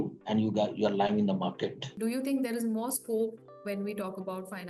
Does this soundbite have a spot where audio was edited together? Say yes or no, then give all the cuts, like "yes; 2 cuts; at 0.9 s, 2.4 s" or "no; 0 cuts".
yes; 1 cut; at 1.9 s